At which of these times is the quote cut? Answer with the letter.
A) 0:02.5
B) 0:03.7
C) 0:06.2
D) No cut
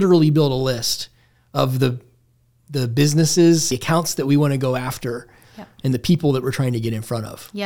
B